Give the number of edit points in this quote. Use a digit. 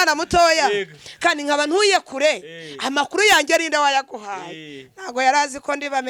0